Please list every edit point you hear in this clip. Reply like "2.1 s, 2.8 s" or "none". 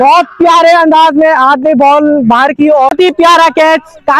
2.9 s